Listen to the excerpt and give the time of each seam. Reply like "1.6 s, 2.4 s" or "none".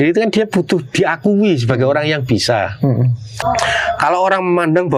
3.4 s